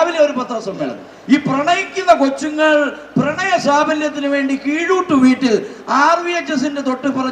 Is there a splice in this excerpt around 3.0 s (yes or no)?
no